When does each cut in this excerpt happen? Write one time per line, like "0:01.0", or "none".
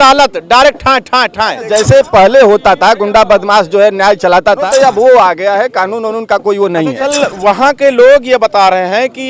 0:01.7
0:04.6
0:07.0